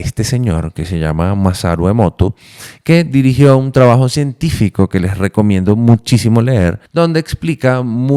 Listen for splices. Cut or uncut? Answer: cut